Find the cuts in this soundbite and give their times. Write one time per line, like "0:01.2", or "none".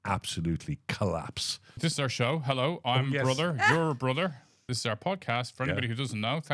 0:01.7
0:04.7